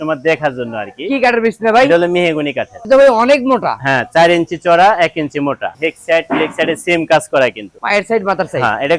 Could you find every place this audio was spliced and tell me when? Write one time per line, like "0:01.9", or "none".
none